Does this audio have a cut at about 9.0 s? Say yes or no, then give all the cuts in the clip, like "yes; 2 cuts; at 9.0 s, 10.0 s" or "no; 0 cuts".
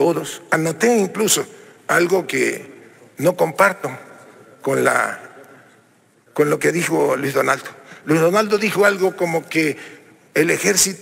no; 0 cuts